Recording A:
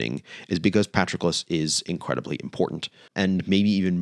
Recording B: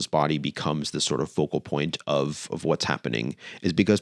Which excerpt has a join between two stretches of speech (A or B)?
A